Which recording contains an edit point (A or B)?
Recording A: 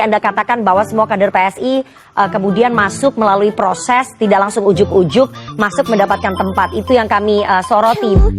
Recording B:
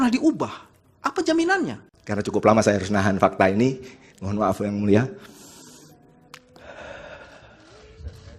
B